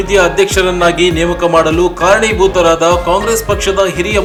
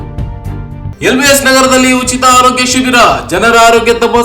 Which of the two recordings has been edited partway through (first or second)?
second